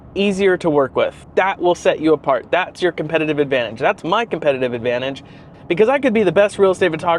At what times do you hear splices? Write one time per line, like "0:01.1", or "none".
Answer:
0:01.2
0:05.5